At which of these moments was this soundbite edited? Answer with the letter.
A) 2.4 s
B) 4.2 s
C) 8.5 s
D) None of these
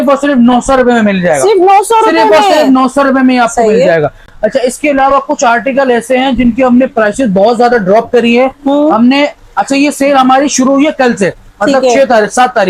D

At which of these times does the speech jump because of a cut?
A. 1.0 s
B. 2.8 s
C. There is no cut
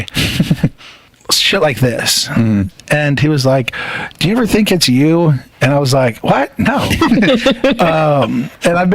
A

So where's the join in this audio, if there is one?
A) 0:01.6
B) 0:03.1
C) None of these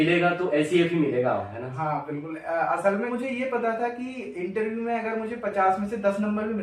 B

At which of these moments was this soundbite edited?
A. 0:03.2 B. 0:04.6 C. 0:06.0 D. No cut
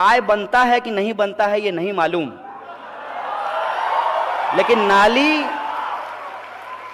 D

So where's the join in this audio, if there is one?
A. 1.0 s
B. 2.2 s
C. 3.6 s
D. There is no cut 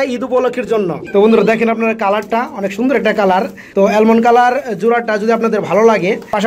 A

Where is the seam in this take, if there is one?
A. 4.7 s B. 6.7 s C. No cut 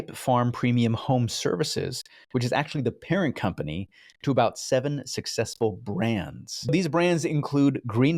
B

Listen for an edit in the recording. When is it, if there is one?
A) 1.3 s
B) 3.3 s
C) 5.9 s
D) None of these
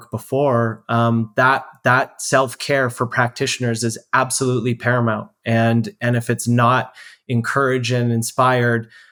D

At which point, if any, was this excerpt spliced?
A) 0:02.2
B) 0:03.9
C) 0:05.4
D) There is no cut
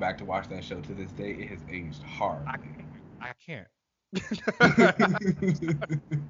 D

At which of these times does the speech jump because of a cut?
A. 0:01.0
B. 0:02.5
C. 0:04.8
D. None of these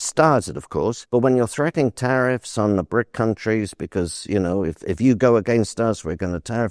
A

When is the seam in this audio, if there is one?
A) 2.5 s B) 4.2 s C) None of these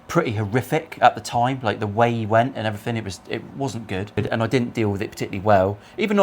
B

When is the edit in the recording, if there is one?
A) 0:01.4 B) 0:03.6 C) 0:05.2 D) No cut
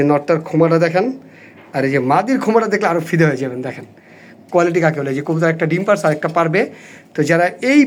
D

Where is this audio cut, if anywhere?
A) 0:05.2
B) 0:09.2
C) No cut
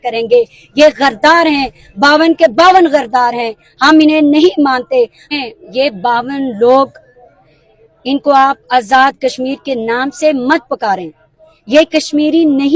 A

